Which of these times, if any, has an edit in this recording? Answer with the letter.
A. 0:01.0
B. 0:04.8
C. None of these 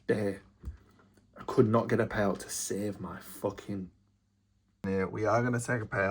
B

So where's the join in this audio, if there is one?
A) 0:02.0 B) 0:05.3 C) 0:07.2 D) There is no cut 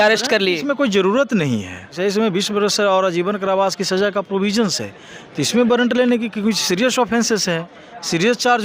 A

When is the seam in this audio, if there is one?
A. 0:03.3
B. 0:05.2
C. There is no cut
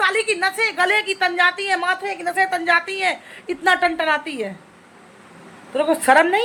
C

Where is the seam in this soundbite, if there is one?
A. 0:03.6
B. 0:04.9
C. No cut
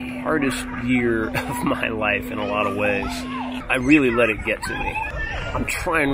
A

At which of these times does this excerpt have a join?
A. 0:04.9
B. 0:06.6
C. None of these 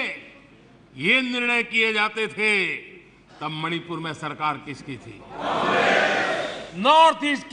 B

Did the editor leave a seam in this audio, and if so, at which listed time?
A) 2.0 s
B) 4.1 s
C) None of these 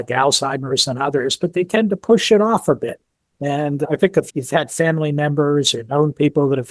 C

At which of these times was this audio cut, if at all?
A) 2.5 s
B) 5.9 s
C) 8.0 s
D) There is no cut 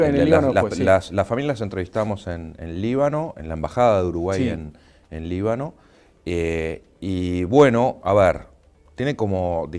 C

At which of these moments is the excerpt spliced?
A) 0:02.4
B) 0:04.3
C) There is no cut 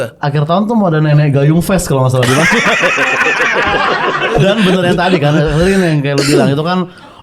B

